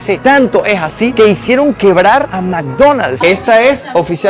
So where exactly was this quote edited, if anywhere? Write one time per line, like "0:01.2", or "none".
0:02.3
0:03.2